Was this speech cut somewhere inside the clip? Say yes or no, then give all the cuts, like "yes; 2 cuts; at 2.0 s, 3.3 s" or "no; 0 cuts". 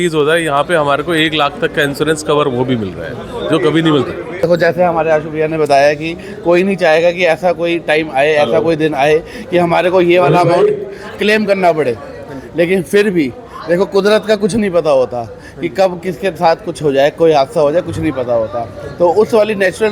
yes; 1 cut; at 4.4 s